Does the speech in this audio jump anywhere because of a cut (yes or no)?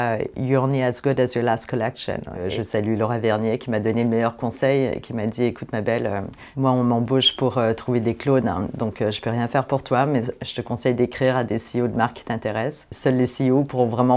yes